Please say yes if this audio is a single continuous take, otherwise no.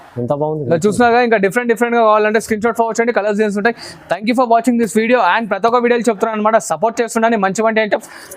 yes